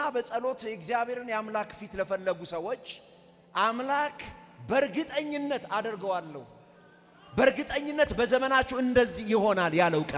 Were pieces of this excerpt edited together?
no; 0 cuts

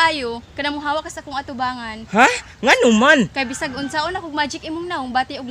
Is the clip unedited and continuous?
yes; 0 cuts

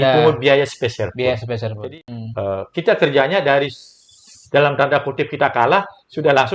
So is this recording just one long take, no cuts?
no; 1 cut; at 1.8 s

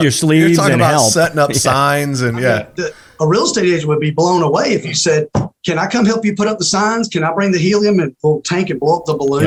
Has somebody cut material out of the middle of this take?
no; 0 cuts

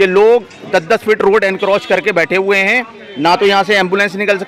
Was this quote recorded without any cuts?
yes; 0 cuts

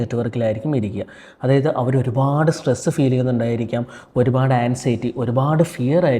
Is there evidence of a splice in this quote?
no; 0 cuts

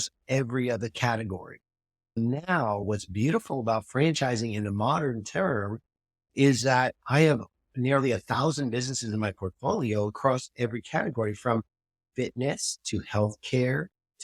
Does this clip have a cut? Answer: yes; 1 cut; at 2.8 s

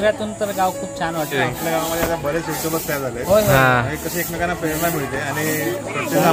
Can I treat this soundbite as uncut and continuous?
no; 1 cut; at 1.4 s

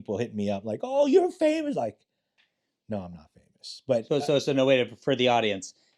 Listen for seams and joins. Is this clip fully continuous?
yes; 0 cuts

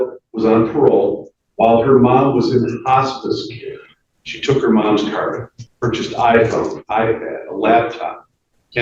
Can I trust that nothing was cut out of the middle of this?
yes; 0 cuts

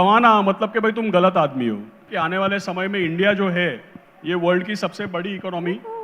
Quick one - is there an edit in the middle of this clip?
yes; 1 cut; at 2.0 s

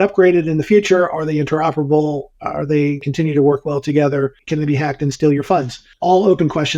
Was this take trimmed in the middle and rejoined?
yes; 3 cuts; at 3.1 s, 4.4 s, 5.9 s

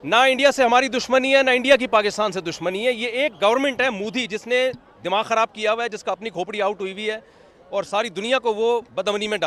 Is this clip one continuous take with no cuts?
yes; 0 cuts

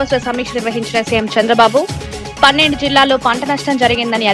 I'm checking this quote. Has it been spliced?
no; 0 cuts

